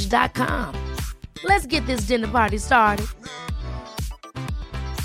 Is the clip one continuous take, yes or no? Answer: yes